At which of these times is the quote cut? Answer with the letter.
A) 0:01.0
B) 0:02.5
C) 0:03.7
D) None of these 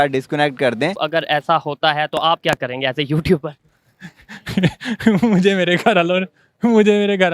A